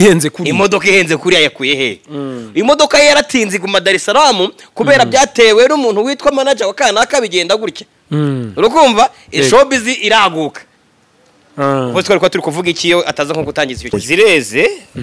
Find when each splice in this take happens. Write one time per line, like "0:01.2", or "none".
0:13.9

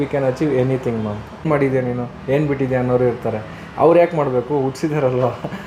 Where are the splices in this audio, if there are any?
0:01.5

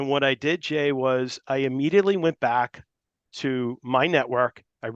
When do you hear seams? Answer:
none

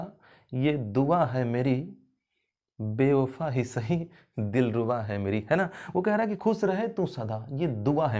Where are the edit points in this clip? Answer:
none

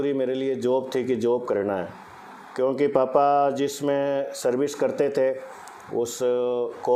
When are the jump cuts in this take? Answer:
none

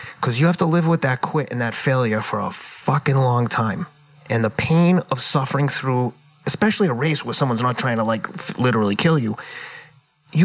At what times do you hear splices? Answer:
none

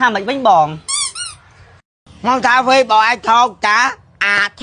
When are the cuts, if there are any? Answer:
none

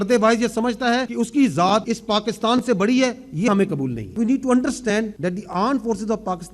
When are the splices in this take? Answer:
0:01.1
0:01.9
0:04.1
0:05.1

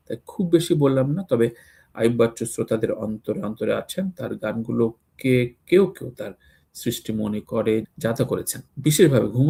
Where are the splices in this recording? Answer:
none

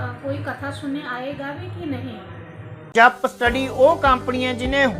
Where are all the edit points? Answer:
0:02.9

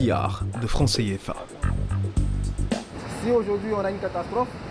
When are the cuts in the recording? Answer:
0:03.0

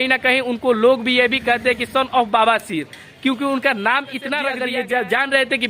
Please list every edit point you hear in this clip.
0:04.5

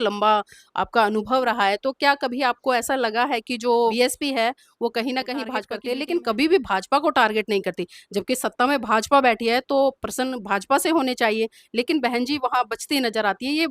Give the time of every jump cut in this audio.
0:03.9
0:05.8

